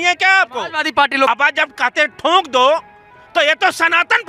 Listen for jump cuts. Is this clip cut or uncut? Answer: cut